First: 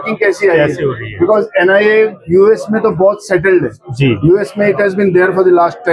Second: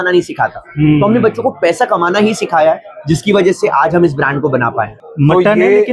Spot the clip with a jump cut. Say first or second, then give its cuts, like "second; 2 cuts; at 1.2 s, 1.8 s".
second; 1 cut; at 5.0 s